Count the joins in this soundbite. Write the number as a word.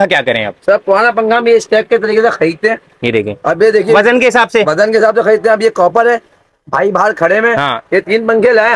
zero